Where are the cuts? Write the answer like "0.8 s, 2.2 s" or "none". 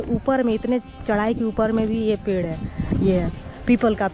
none